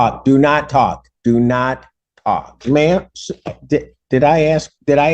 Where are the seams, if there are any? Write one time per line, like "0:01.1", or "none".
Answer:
0:02.6